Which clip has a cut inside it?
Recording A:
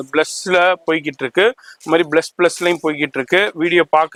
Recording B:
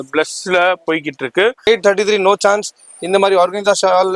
B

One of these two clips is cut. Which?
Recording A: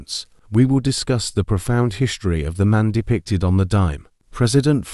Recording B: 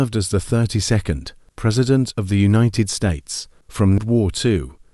B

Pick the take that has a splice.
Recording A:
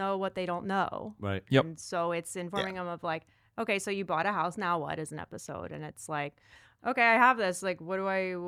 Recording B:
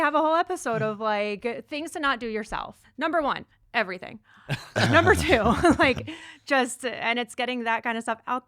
B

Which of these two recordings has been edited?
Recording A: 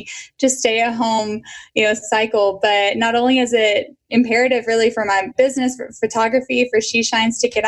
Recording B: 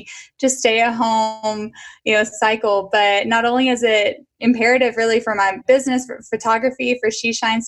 A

